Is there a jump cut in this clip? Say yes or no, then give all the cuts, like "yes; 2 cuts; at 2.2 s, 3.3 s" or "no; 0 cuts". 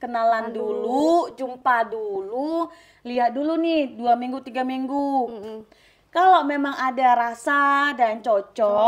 no; 0 cuts